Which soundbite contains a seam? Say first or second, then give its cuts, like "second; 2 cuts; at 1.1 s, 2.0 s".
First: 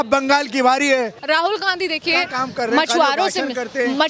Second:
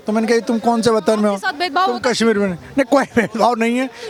first; 1 cut; at 1.2 s